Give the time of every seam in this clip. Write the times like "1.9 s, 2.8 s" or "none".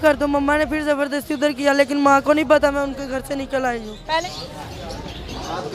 4.2 s

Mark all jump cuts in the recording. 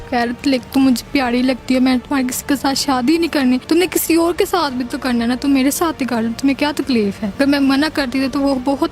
3.6 s, 7.2 s

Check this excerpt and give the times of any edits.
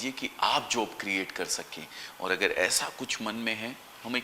none

